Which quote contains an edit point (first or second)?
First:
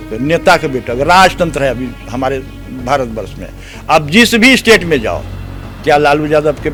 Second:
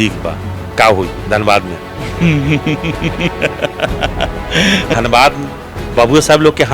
second